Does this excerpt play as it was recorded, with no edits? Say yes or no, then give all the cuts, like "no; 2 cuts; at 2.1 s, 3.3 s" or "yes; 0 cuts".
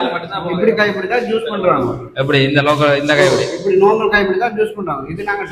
yes; 0 cuts